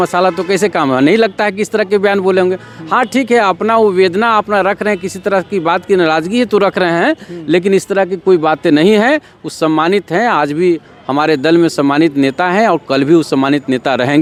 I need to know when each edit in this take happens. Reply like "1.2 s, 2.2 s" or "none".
none